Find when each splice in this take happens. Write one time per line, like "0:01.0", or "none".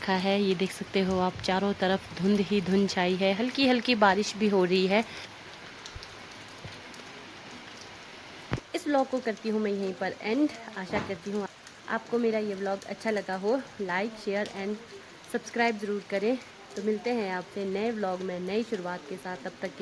none